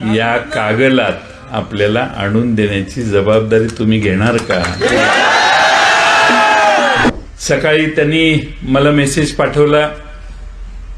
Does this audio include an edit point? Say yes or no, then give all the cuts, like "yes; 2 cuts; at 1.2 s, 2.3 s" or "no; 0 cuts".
yes; 1 cut; at 7.1 s